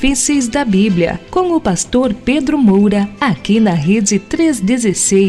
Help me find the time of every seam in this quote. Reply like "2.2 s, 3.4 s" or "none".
3.1 s